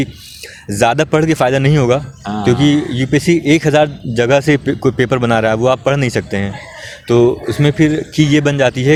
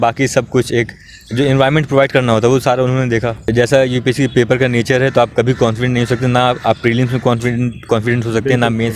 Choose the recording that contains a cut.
second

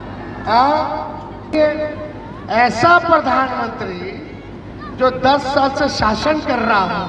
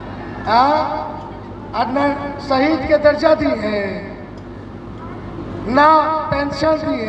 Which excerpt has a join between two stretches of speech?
first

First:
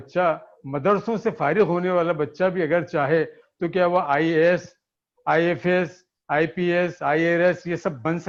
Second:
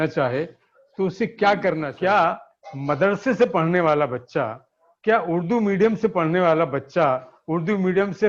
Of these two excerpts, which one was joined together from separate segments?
second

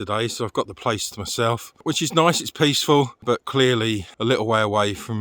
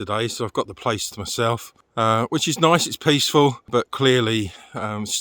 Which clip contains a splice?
first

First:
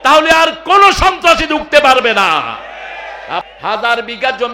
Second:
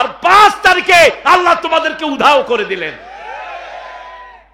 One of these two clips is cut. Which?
first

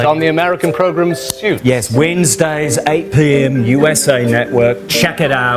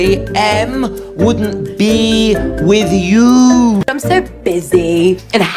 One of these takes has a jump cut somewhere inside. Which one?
second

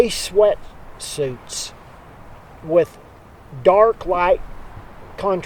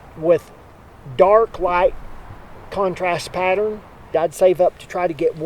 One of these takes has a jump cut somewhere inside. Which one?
second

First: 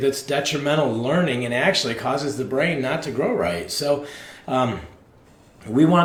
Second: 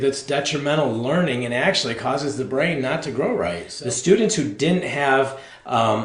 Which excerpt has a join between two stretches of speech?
second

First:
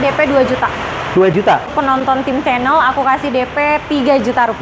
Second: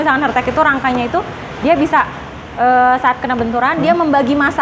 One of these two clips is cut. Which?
first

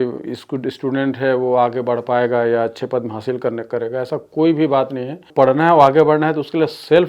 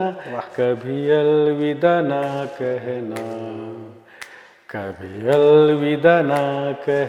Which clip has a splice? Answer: first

